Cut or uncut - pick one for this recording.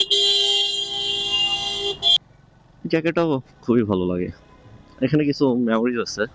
cut